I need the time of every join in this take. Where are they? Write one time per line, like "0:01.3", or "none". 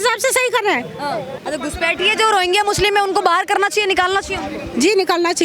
0:01.4